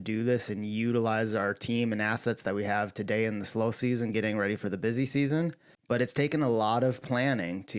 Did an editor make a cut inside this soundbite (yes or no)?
no